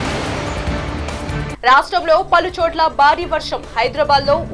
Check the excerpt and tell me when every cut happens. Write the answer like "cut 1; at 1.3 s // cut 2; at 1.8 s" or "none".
cut 1; at 1.5 s